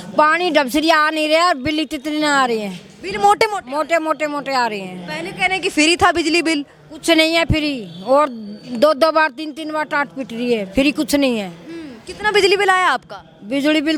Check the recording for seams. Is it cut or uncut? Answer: uncut